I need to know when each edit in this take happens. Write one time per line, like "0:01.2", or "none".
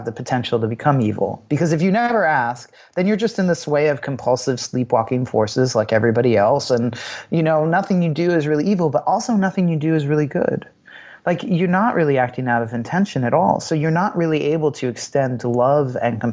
none